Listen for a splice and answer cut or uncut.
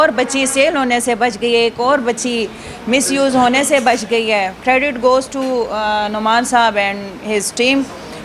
uncut